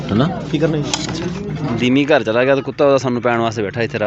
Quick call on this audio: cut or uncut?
cut